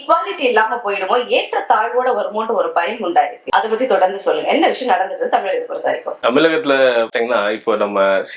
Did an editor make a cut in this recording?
no; 0 cuts

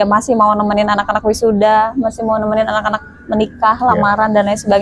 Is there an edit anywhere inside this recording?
no; 0 cuts

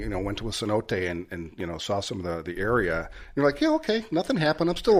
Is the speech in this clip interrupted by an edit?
no; 0 cuts

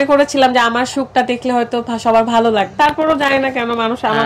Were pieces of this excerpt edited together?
yes; 1 cut; at 2.7 s

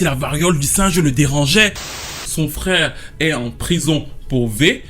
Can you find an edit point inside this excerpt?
yes; 1 cut; at 2.0 s

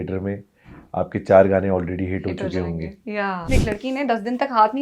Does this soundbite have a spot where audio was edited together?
yes; 1 cut; at 3.5 s

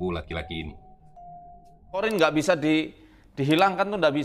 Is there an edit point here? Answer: yes; 1 cut; at 2.0 s

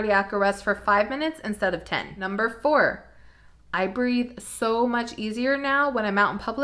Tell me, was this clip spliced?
no; 0 cuts

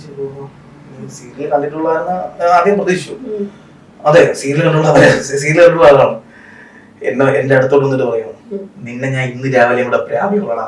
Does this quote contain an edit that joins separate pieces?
no; 0 cuts

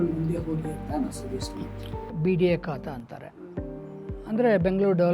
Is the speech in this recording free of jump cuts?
no; 1 cut; at 2.1 s

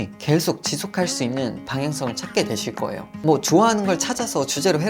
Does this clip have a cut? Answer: yes; 1 cut; at 3.1 s

